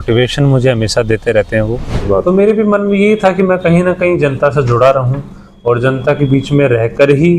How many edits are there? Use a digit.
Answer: 1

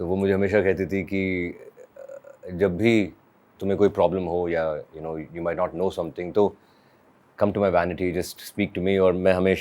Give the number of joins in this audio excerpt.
0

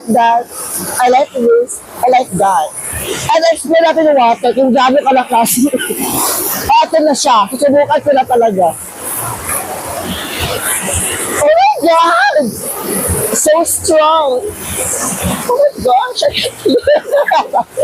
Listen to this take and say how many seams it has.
0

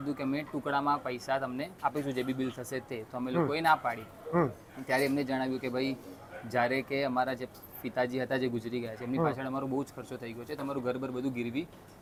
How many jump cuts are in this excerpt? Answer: 0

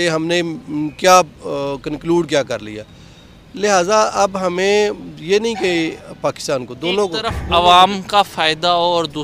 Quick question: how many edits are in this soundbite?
0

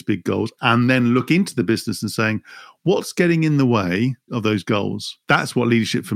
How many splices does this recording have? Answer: 1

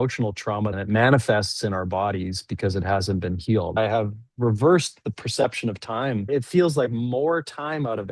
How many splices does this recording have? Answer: 3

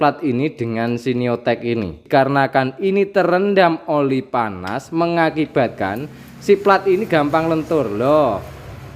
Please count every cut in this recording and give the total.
1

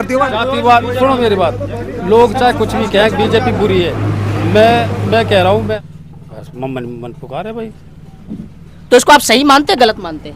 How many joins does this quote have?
1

